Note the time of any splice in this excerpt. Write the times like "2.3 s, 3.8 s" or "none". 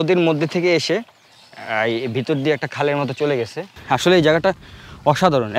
3.7 s

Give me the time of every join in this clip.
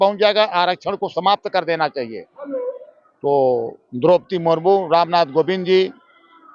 none

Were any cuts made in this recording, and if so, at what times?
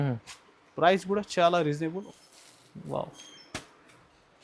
2.0 s

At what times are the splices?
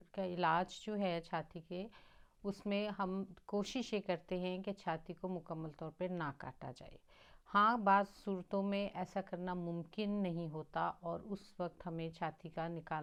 none

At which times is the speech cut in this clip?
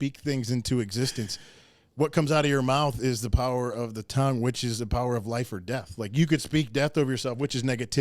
none

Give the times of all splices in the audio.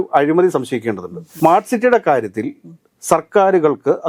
1.3 s

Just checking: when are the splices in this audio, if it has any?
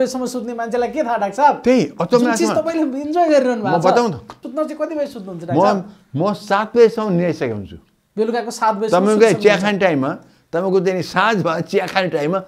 4.3 s

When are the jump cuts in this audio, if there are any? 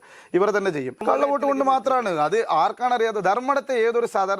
1.0 s

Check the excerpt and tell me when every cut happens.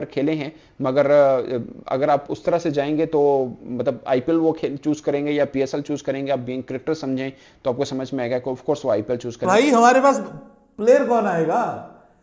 9.4 s

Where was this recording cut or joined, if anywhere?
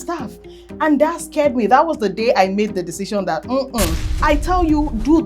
4.0 s

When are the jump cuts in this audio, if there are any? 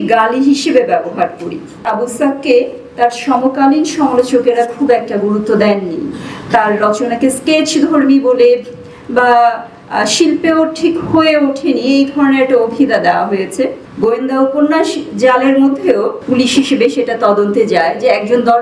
1.8 s, 13.8 s, 16.2 s

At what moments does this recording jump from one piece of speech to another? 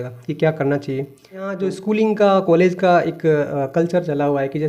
1.5 s

